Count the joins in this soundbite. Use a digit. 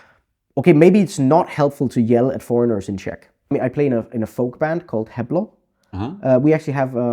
1